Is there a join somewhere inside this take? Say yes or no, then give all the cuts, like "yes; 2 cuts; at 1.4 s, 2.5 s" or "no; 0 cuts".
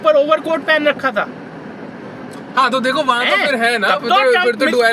yes; 1 cut; at 2.1 s